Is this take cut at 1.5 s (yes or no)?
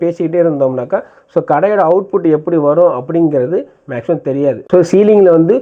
no